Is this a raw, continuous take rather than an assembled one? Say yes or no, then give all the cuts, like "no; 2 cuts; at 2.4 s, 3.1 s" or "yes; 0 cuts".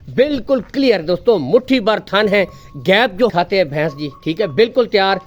no; 1 cut; at 3.3 s